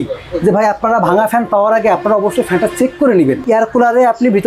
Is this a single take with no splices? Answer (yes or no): no